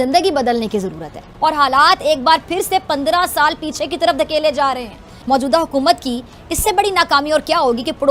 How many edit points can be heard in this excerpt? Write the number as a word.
zero